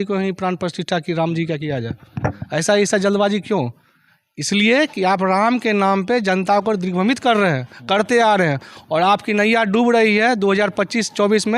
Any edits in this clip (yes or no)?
no